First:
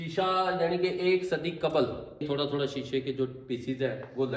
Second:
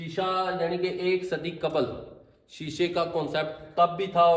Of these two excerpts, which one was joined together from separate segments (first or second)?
first